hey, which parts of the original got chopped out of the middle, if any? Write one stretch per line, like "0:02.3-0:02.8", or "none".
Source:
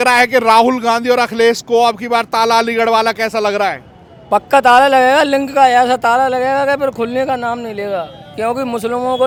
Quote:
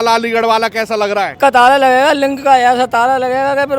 0:03.8-0:04.4